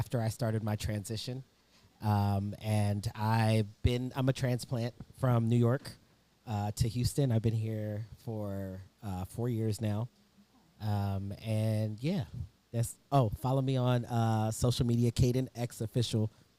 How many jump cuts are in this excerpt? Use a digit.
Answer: 0